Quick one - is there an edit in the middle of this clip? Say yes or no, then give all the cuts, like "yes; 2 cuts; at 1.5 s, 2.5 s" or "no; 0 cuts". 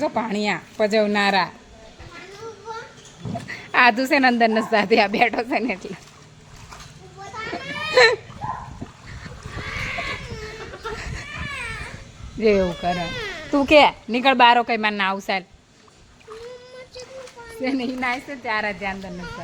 no; 0 cuts